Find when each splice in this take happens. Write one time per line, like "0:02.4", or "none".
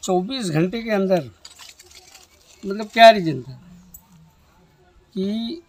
none